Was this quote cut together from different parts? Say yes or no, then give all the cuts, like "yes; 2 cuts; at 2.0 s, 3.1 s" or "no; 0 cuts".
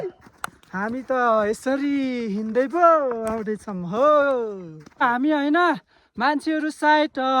yes; 1 cut; at 5.0 s